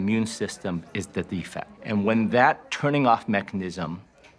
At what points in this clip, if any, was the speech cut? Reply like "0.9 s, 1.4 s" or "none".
1.7 s

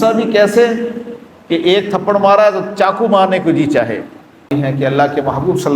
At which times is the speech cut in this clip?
4.5 s

